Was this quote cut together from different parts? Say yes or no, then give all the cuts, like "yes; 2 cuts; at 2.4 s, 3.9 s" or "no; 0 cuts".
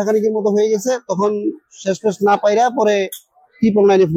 no; 0 cuts